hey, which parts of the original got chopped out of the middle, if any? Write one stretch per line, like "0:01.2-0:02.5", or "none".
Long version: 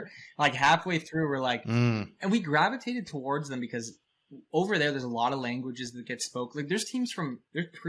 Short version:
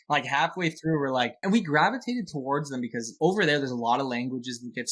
0:01.6-0:02.1
0:03.8-0:04.4

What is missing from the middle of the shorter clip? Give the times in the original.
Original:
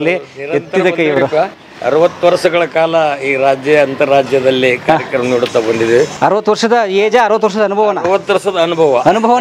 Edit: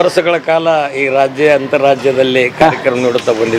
none

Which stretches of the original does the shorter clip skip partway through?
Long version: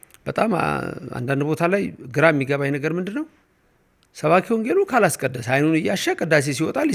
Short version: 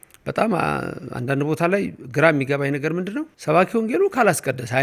0:03.3-0:04.1

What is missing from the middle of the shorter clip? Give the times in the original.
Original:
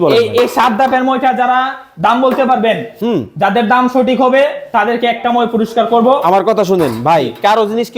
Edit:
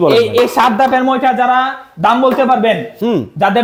none

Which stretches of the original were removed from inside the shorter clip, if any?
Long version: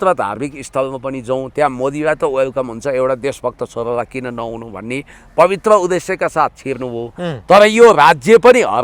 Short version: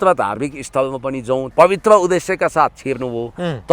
0:01.5-0:05.3

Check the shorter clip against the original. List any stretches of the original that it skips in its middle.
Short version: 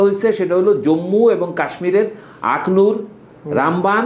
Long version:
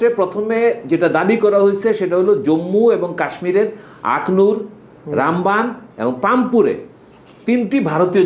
none

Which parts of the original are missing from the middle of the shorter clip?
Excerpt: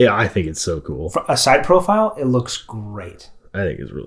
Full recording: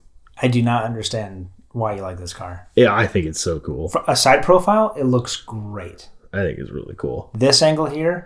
none

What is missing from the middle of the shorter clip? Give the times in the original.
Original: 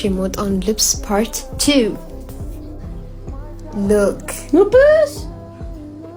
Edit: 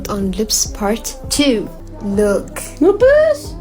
0:02.1-0:03.6

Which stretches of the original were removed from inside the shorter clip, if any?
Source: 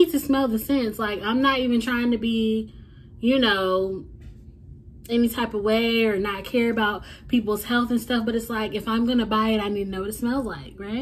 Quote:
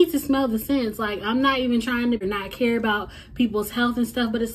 0:02.2-0:06.1

